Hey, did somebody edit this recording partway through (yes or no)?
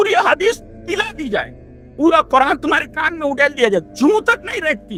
no